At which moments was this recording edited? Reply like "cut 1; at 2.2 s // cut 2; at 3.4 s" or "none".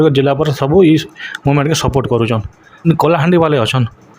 cut 1; at 2.9 s